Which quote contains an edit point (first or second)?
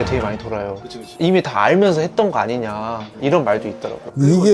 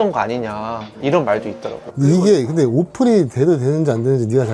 first